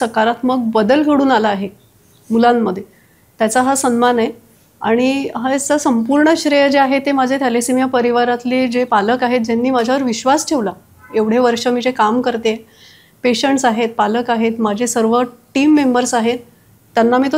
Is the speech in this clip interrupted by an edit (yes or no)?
no